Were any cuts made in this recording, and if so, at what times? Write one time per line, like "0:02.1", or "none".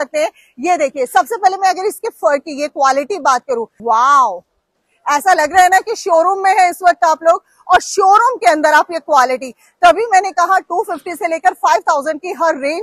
0:03.7